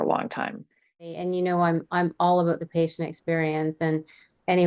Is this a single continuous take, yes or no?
no